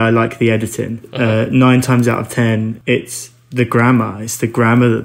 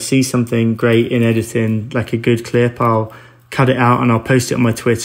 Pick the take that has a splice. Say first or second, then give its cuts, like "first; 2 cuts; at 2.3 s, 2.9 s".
first; 2 cuts; at 1.1 s, 2.8 s